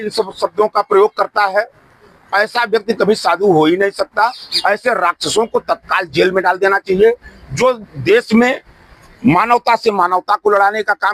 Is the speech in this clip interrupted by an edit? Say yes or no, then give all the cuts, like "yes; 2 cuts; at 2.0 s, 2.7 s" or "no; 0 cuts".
yes; 1 cut; at 4.5 s